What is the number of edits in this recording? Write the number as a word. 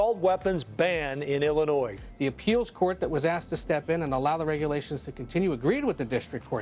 zero